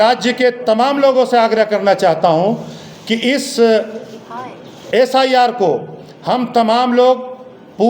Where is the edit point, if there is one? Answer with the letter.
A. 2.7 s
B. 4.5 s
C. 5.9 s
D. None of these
D